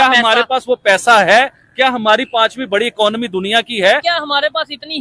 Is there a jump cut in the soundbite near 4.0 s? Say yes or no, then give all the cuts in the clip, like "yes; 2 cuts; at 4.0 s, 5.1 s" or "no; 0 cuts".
yes; 1 cut; at 4.0 s